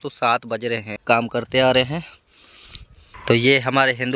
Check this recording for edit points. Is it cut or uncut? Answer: cut